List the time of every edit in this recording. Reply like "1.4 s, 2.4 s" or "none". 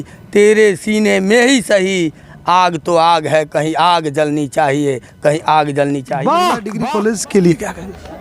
6.7 s